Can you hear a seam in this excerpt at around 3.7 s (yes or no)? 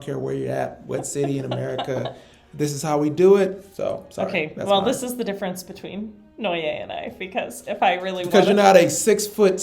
yes